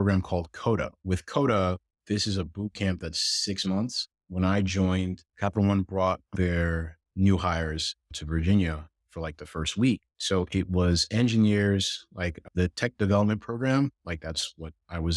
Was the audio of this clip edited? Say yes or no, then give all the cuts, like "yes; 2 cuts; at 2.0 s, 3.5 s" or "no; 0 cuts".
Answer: yes; 4 cuts; at 1.0 s, 4.2 s, 5.2 s, 10.1 s